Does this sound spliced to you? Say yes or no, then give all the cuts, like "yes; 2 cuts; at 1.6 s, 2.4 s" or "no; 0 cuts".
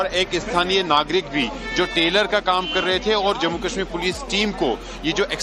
no; 0 cuts